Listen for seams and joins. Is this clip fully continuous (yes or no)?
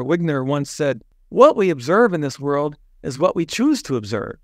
no